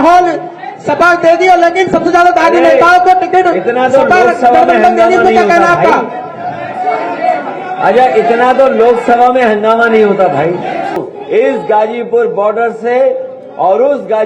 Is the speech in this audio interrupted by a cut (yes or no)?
yes